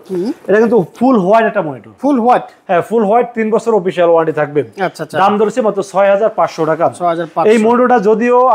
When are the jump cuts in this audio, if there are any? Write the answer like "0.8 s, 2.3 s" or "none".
none